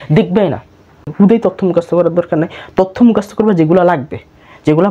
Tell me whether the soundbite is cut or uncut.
cut